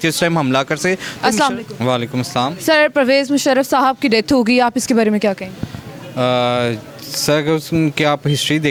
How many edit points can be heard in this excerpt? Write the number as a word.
zero